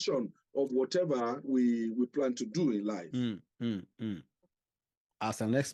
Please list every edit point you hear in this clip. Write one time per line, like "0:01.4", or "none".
none